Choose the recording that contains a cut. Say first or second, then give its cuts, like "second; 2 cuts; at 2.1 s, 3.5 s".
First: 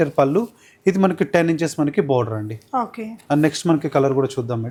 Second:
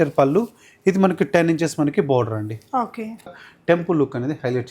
second; 1 cut; at 3.3 s